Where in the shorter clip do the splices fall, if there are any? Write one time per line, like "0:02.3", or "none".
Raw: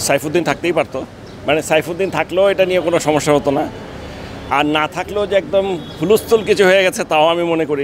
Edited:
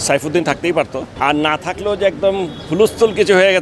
0:01.0